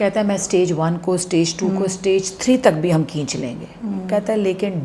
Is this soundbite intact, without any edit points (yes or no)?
yes